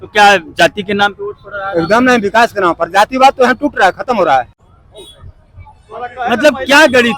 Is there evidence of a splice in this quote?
yes; 1 cut; at 4.6 s

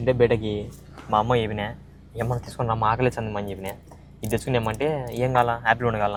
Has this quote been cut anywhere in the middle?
no; 0 cuts

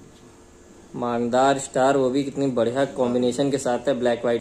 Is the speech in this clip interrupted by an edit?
no; 0 cuts

